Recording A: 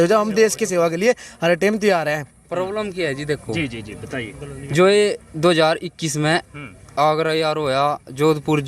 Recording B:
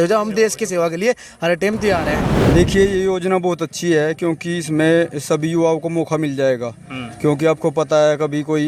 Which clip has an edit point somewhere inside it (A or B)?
B